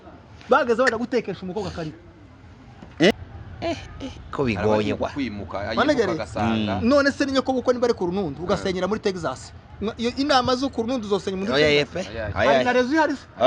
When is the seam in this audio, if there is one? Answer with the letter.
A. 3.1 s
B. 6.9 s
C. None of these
A